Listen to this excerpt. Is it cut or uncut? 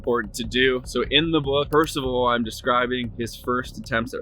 cut